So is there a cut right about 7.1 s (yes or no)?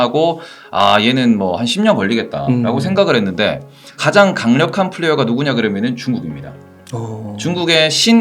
no